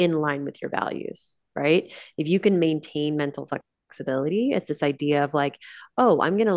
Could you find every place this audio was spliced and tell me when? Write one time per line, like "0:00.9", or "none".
none